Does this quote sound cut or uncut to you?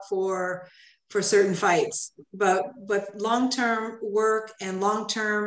uncut